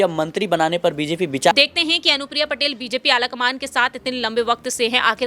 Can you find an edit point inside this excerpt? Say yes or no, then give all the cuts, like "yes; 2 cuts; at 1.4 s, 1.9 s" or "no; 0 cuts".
yes; 1 cut; at 1.5 s